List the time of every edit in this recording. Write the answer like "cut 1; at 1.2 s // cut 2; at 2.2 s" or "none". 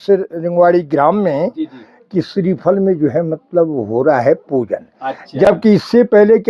none